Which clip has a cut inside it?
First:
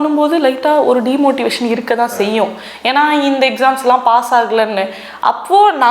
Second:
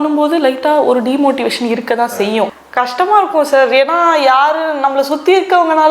second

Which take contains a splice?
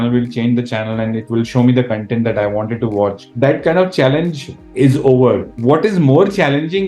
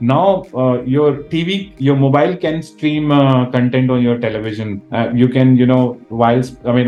first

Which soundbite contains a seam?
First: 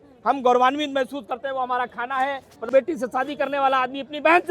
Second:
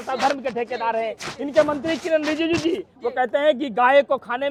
first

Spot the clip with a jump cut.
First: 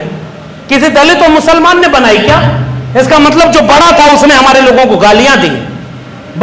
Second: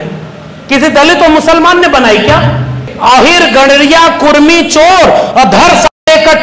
second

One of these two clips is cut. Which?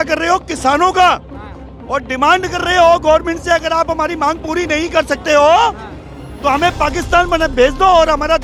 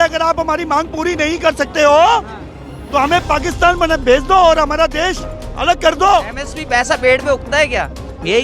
second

